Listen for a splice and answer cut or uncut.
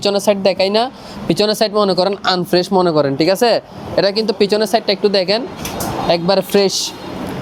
uncut